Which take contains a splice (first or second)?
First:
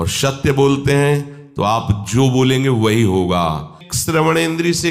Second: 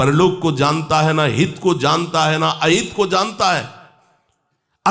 first